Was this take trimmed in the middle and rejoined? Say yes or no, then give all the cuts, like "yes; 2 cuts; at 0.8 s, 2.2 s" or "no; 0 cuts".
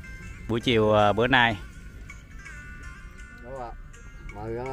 yes; 1 cut; at 3.4 s